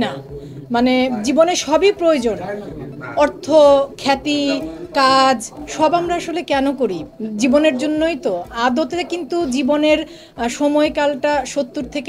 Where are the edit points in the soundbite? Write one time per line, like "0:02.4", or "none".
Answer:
none